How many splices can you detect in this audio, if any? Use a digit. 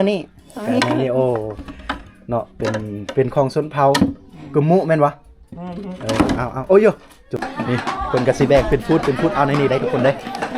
1